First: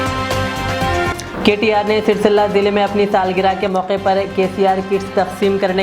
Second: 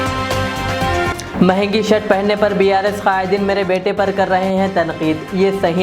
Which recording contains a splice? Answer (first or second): first